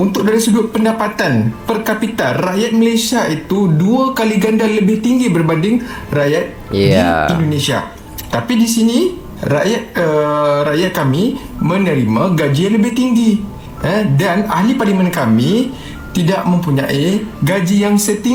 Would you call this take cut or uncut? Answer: uncut